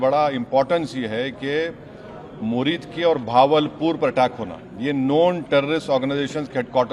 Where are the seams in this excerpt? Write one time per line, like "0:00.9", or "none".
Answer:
none